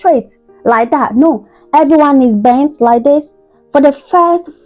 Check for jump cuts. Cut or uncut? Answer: uncut